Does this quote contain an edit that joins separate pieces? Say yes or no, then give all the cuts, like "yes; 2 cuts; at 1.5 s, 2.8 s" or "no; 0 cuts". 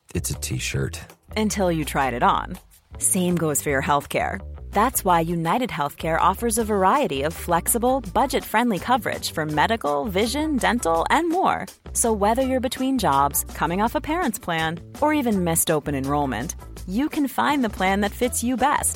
no; 0 cuts